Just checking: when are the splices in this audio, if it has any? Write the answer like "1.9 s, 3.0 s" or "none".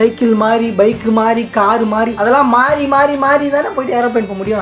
none